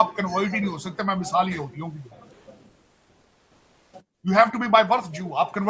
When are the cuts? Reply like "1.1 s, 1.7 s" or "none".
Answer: none

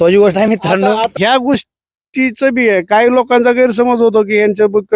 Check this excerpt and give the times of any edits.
1.1 s

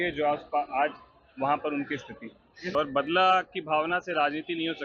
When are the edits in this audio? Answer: 2.7 s

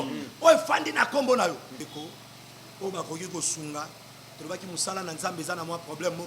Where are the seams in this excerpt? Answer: 1.8 s

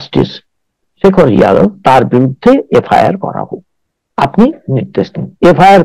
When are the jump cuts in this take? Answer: none

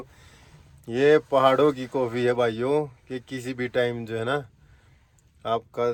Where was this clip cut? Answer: none

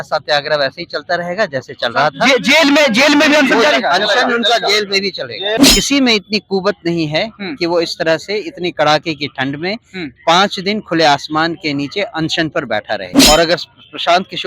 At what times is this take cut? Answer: 5.6 s, 13.1 s

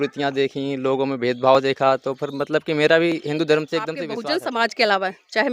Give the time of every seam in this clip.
4.1 s

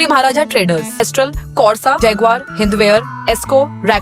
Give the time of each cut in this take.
1.0 s

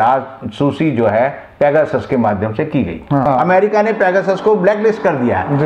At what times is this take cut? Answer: 3.2 s

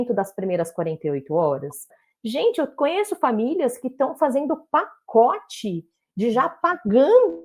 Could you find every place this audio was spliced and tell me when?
2.0 s

